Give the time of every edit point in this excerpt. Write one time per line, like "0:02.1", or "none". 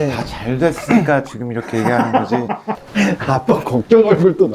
0:02.8